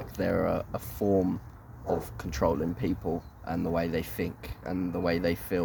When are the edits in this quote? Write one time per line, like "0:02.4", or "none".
none